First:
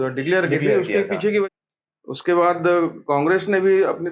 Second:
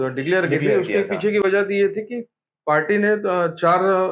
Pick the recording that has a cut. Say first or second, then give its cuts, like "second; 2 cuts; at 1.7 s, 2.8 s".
first; 1 cut; at 1.5 s